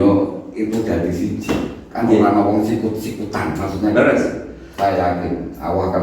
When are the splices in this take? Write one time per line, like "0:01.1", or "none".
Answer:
0:04.6